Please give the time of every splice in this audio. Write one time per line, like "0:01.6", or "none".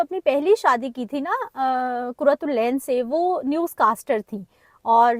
none